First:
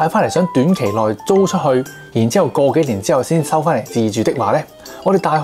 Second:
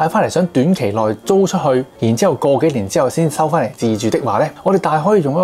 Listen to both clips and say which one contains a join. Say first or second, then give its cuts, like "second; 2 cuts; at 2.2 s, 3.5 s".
second; 2 cuts; at 1.9 s, 4.6 s